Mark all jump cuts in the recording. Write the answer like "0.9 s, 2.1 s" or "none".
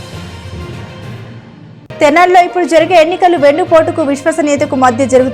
1.8 s